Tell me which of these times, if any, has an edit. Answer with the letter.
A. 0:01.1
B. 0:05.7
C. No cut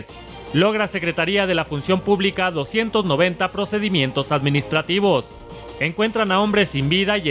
B